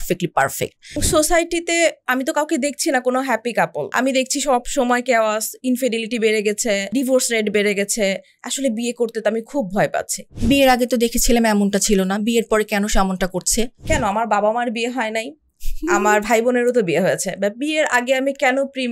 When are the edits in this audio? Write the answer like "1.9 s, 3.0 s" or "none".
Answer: 1.0 s, 3.9 s, 6.9 s, 10.3 s, 13.8 s